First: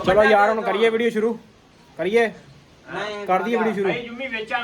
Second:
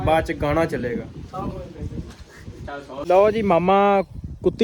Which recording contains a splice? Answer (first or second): second